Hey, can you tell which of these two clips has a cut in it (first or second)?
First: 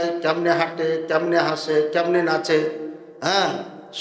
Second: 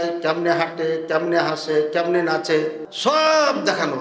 second